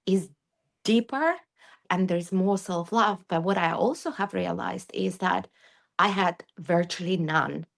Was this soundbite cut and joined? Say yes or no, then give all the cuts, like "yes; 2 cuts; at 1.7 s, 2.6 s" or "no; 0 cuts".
yes; 1 cut; at 1.8 s